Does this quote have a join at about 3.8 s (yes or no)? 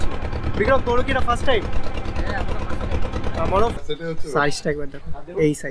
yes